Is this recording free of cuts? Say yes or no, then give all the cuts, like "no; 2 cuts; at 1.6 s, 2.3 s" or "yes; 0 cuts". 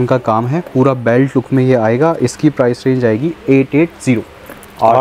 yes; 0 cuts